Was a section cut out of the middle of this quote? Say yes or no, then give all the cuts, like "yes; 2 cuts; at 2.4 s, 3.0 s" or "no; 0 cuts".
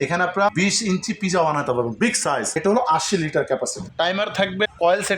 yes; 2 cuts; at 2.5 s, 3.8 s